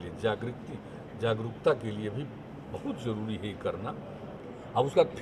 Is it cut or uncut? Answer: cut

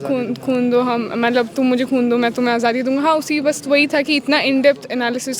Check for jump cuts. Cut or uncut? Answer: uncut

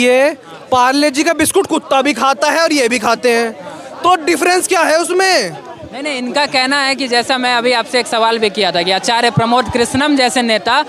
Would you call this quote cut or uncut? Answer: uncut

